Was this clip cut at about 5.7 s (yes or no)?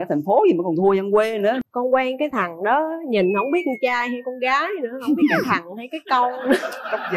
no